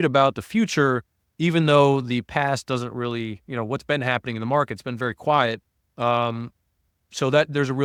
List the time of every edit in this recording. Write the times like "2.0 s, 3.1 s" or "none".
none